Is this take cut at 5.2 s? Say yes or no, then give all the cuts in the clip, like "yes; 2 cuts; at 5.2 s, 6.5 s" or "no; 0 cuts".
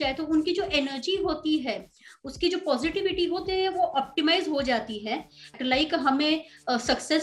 no; 0 cuts